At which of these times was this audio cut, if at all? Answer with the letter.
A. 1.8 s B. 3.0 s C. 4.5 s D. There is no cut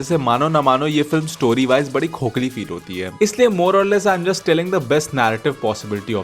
B